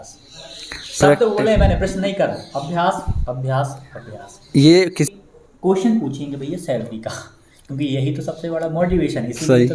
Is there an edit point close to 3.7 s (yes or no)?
no